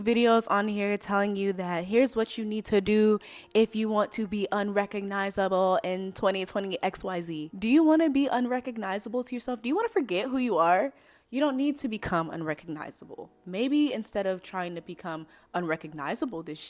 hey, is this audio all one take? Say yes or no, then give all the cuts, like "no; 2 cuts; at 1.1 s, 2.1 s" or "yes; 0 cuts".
yes; 0 cuts